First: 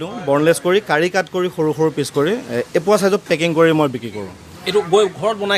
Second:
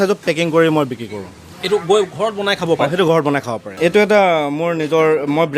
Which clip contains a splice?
second; 1 cut; at 3.6 s

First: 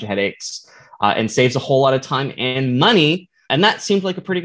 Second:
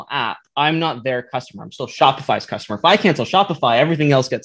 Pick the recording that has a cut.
first; 1 cut; at 3.5 s

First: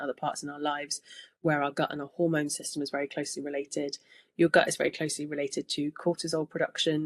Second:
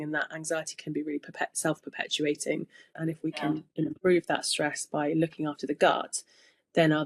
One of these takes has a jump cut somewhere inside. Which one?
second; 1 cut; at 2.8 s

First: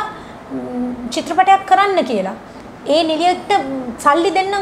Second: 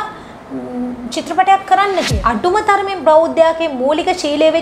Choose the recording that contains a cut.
second; 1 cut; at 2.1 s

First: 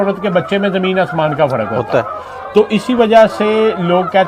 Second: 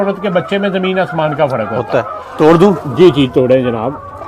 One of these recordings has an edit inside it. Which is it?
second; 1 cut; at 2.2 s

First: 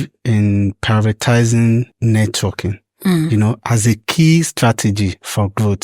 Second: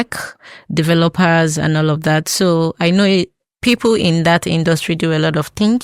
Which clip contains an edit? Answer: first; 1 cut; at 1.9 s

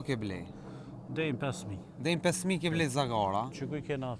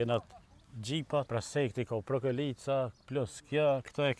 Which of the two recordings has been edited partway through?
second; 1 cut; at 1.3 s

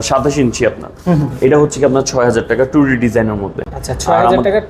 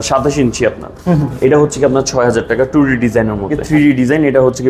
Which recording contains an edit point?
second; 1 cut; at 3.6 s

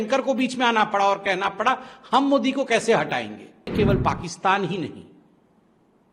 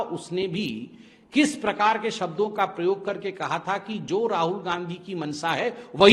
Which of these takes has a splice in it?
first; 1 cut; at 3.7 s

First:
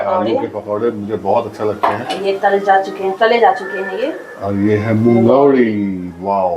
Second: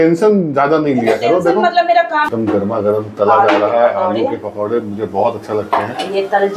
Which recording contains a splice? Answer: second; 1 cut; at 2.3 s

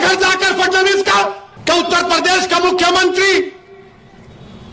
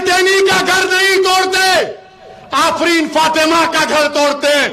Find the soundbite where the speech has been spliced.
first; 1 cut; at 1.5 s

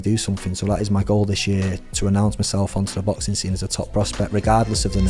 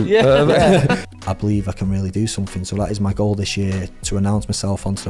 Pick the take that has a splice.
second; 1 cut; at 1.0 s

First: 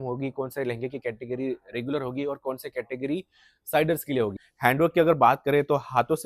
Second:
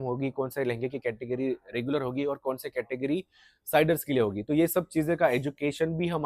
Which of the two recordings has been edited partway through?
first; 1 cut; at 4.4 s

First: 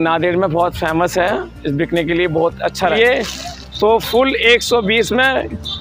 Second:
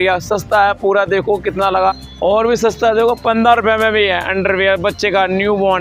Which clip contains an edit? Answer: first; 1 cut; at 2.9 s

